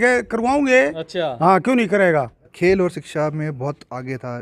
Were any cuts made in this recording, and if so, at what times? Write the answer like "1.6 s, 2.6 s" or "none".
2.5 s